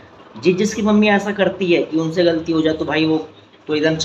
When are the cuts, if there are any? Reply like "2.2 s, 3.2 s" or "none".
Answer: none